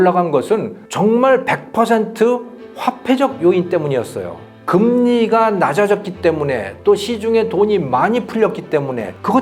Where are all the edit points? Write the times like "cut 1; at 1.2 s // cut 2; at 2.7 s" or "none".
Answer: none